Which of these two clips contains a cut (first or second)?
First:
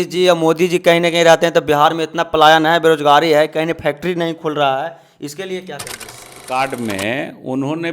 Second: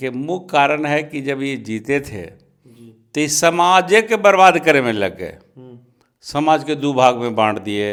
first